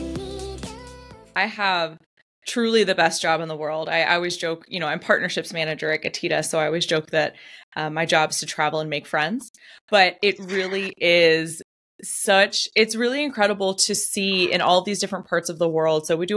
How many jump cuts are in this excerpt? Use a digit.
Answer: 1